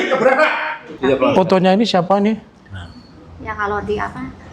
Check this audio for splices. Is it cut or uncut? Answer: cut